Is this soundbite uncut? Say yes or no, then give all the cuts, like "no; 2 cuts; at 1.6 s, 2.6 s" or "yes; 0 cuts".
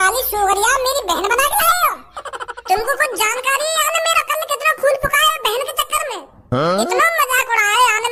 yes; 0 cuts